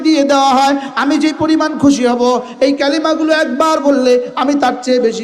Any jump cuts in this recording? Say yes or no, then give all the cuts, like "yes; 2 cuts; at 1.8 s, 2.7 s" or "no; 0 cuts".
no; 0 cuts